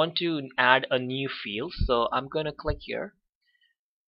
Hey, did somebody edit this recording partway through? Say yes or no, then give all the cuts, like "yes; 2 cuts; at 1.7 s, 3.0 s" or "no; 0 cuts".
yes; 1 cut; at 2.1 s